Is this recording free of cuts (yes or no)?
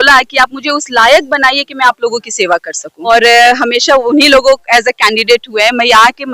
no